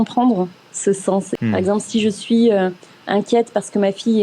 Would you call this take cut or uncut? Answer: cut